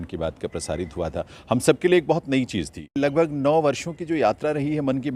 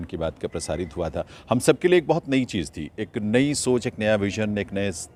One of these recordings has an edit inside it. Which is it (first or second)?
first